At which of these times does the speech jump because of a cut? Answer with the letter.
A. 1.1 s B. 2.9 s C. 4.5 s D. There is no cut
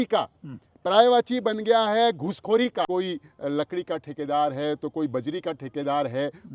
B